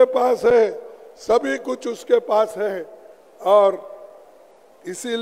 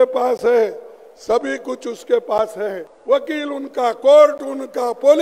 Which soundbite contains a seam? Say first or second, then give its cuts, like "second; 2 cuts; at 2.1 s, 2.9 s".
second; 1 cut; at 2.9 s